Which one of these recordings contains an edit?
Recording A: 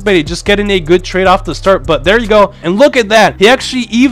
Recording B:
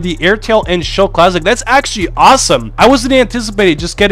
A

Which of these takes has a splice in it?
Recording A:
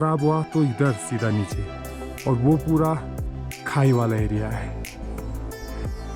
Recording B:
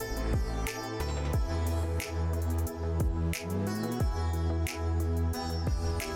A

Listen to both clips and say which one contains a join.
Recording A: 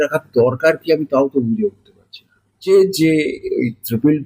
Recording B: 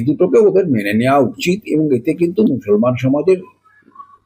A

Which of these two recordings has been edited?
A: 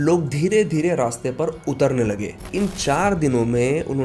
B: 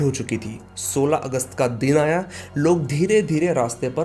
A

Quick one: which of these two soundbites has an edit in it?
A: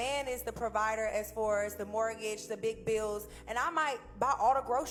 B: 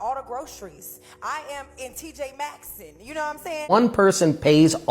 B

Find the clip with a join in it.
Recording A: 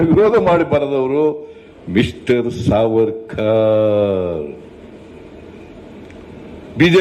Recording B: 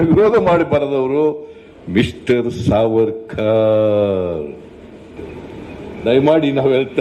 B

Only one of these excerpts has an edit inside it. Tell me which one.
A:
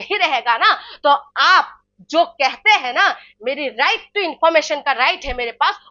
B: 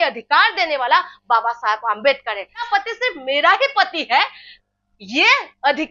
B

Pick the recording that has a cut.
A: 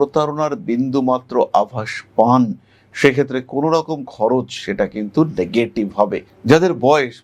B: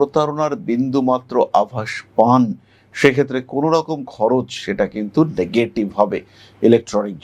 A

